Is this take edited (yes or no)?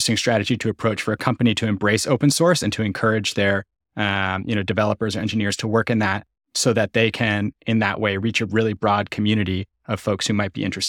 no